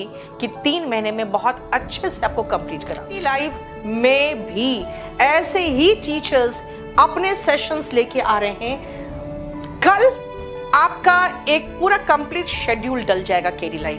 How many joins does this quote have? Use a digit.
1